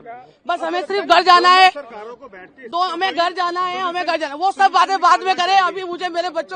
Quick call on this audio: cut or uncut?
uncut